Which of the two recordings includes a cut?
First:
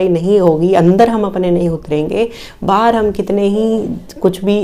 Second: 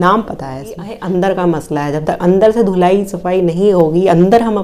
second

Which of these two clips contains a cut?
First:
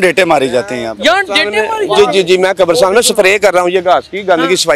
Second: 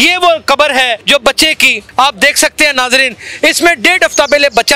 second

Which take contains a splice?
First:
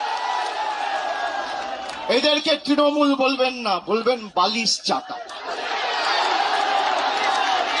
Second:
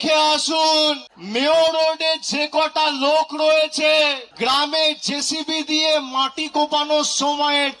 second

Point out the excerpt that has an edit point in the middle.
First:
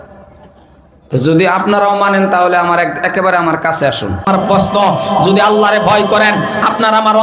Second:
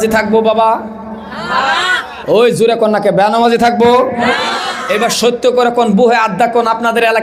first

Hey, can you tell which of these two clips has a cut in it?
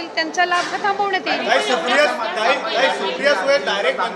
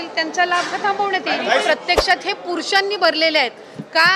second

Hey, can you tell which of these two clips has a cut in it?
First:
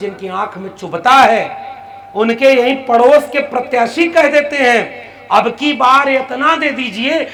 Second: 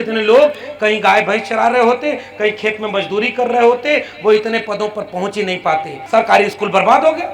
second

